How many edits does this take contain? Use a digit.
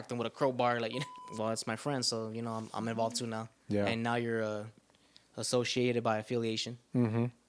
1